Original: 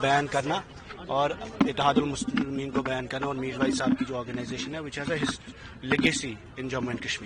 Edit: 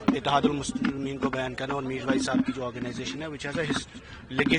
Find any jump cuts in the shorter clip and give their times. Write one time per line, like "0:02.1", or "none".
none